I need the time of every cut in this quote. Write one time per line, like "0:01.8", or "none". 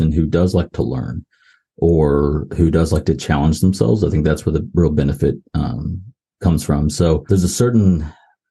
0:07.2

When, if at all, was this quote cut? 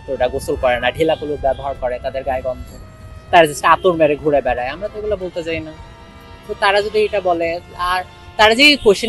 none

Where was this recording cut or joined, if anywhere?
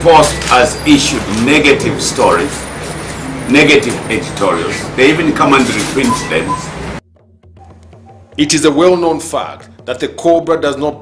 0:05.7

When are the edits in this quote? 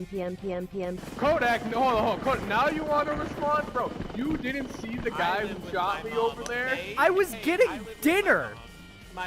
0:00.9

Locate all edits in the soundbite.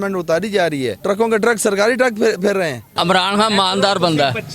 0:01.0
0:02.9

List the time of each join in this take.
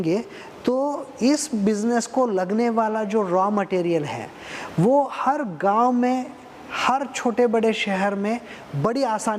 none

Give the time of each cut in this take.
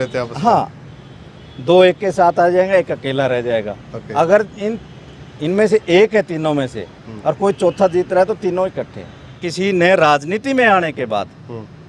0:09.4

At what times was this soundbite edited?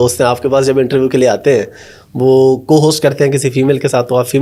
none

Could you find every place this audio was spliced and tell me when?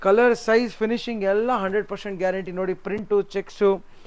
none

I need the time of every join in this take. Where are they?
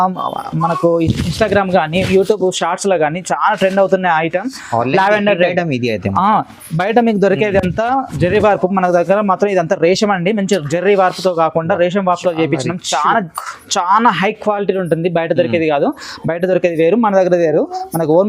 none

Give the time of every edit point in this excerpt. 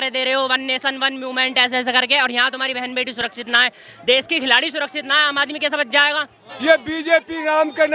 0:06.4

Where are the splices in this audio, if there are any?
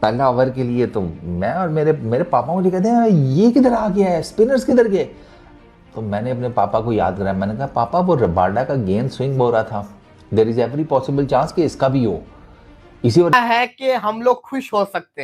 0:13.3

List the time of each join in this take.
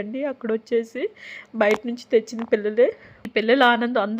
0:03.1

